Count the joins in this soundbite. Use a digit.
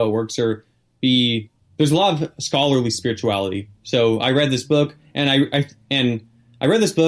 0